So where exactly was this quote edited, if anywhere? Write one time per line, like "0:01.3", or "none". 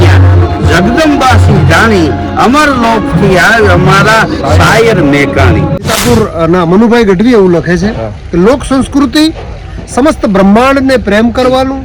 0:05.8